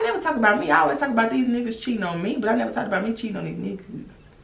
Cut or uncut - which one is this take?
uncut